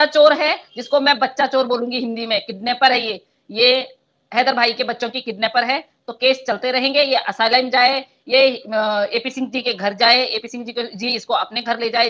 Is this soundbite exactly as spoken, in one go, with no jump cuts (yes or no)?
yes